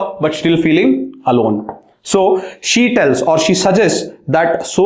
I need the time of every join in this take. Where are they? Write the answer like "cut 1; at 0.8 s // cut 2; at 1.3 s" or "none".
none